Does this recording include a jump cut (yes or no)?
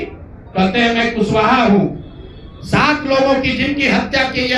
no